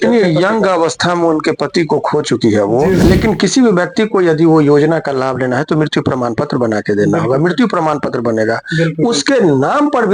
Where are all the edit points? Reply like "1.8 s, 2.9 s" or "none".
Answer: 3.0 s